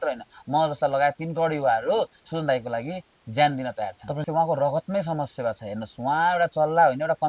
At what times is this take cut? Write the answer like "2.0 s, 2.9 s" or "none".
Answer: 4.2 s

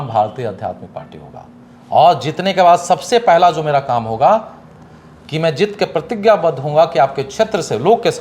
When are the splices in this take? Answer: none

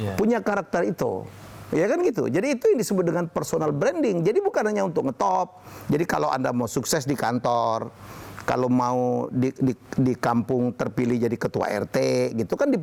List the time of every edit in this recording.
none

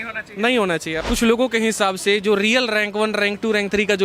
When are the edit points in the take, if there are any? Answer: 1.0 s

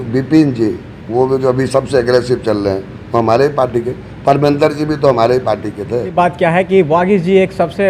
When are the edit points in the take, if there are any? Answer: 6.1 s

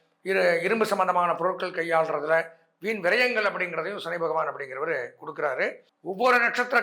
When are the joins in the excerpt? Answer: 5.9 s

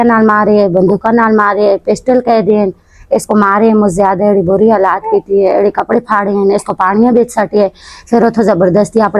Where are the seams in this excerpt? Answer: none

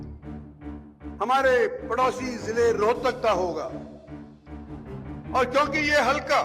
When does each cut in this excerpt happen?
3.7 s, 5.2 s

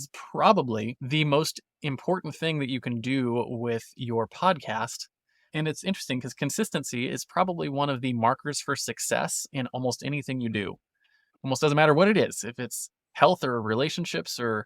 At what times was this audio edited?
1.0 s

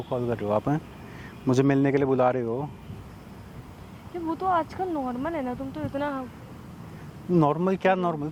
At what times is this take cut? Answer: none

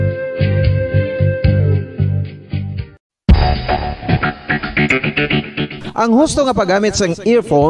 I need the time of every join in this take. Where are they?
2.8 s

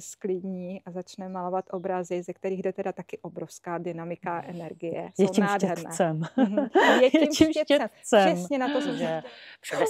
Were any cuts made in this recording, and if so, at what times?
8.9 s

